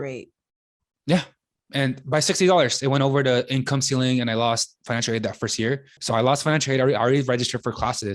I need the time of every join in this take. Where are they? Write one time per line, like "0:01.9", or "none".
0:04.8
0:06.0